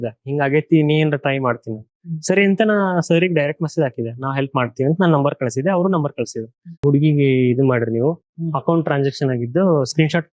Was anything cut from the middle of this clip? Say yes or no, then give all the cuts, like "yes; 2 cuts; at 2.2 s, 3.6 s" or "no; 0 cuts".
yes; 1 cut; at 6.8 s